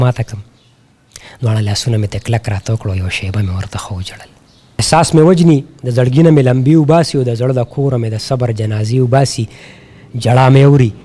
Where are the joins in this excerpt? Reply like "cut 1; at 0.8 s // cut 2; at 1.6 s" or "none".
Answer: cut 1; at 4.8 s